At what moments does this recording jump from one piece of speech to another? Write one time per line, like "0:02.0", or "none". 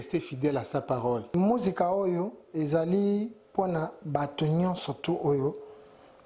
0:01.3